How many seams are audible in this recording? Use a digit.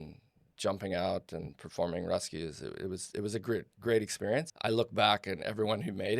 1